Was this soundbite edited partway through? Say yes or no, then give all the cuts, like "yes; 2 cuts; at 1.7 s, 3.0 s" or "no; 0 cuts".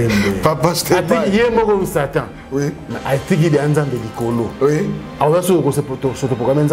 no; 0 cuts